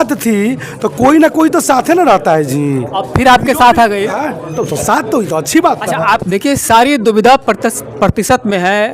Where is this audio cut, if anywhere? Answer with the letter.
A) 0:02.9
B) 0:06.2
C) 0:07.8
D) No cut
B